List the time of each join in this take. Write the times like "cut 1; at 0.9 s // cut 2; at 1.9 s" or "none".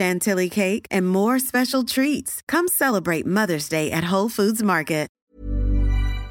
cut 1; at 5.2 s